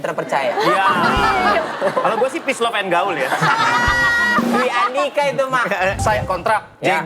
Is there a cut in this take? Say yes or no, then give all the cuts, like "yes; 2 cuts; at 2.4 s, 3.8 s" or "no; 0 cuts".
yes; 2 cuts; at 1.7 s, 6.0 s